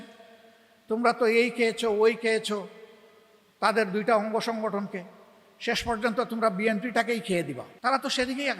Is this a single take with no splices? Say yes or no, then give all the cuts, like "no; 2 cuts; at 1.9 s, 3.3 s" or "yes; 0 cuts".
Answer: no; 1 cut; at 7.7 s